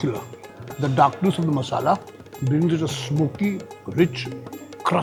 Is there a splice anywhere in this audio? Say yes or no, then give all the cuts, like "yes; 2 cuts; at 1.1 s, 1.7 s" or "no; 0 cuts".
no; 0 cuts